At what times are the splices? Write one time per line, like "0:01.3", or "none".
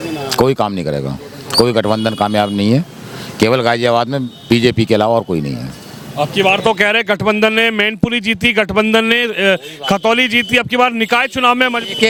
none